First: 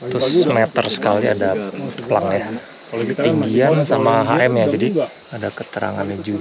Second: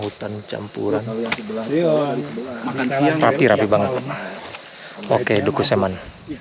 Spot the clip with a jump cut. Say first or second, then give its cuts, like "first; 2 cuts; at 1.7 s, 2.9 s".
first; 2 cuts; at 2.6 s, 5.2 s